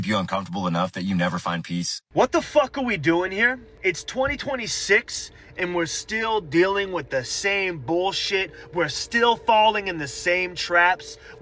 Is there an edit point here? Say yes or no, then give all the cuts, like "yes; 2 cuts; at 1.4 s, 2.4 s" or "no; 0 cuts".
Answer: yes; 2 cuts; at 2.0 s, 3.7 s